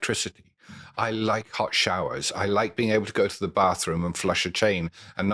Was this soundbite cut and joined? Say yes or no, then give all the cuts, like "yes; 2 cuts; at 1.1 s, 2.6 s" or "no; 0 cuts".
no; 0 cuts